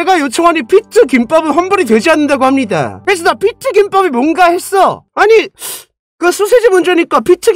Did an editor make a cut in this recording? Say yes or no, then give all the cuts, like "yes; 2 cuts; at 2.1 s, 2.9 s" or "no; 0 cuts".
yes; 1 cut; at 5.0 s